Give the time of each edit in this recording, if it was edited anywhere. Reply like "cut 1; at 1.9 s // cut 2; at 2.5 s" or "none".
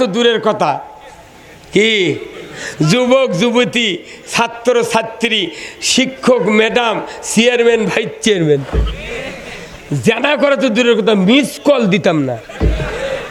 none